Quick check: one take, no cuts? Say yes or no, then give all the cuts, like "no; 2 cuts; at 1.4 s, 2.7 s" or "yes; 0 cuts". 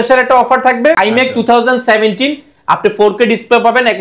no; 1 cut; at 1.0 s